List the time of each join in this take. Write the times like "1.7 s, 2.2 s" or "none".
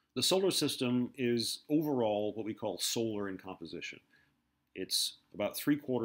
4.1 s